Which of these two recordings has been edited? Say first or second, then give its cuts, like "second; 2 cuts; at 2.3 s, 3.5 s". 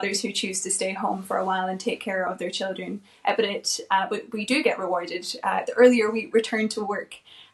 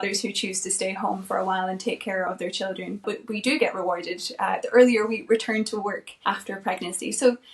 second; 2 cuts; at 3.0 s, 6.1 s